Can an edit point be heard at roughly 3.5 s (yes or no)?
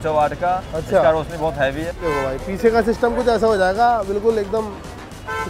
no